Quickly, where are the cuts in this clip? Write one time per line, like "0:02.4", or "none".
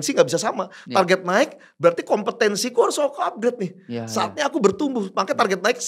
none